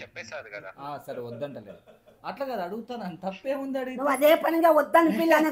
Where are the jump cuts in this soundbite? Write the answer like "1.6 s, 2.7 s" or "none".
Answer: none